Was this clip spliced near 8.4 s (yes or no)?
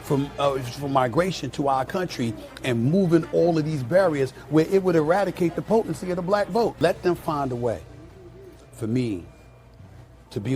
no